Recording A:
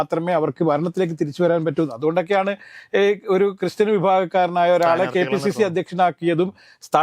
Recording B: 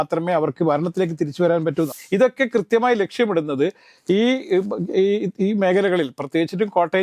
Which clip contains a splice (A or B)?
B